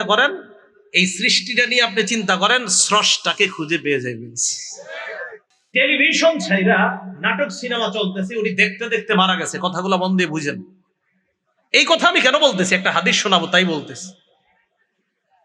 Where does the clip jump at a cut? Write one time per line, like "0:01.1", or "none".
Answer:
0:05.5